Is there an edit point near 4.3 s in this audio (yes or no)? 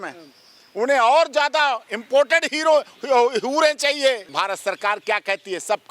yes